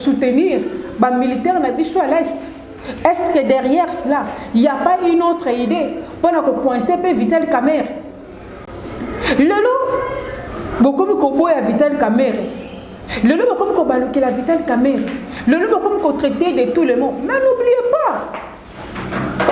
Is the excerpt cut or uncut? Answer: uncut